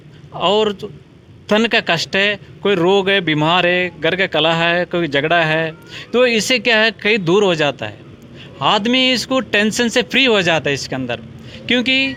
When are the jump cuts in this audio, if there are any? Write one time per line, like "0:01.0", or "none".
none